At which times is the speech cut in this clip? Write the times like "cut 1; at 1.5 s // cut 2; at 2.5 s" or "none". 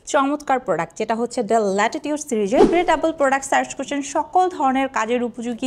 cut 1; at 2.6 s

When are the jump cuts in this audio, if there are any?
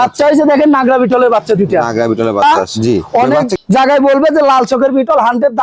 cut 1; at 2.4 s

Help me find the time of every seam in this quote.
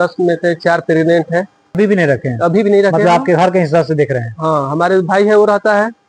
cut 1; at 1.6 s

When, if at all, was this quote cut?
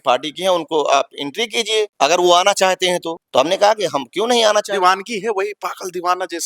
none

